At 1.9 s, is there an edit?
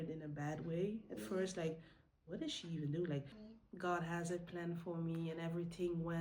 no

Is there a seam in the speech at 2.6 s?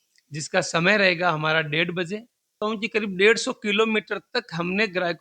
yes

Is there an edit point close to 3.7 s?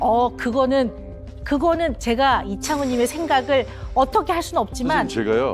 no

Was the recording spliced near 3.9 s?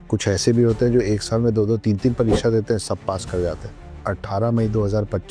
yes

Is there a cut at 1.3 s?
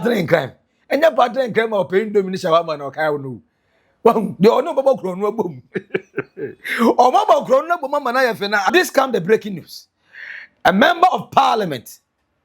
no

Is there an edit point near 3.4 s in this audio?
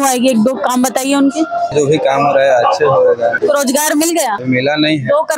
yes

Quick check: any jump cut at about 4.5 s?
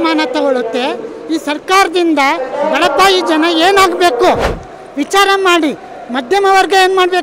yes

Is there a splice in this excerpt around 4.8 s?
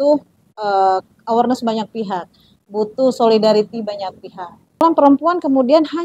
yes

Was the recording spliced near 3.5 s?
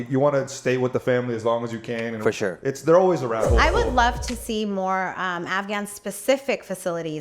yes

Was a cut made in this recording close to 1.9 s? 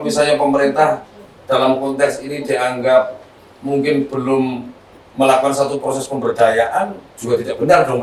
no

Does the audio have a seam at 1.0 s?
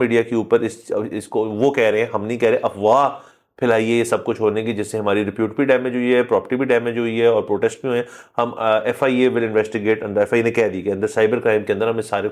no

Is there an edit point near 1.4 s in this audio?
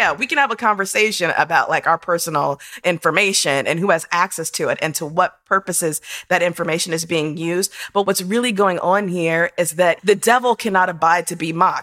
no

